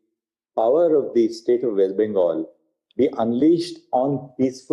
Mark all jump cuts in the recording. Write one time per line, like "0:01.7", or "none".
none